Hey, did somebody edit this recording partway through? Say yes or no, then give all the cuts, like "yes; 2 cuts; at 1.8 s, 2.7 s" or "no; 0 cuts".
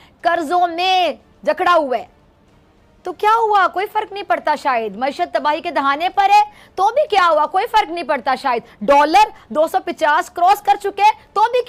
no; 0 cuts